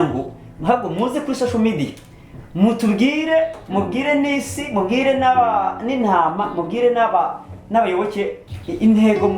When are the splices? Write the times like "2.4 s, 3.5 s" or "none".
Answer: 8.4 s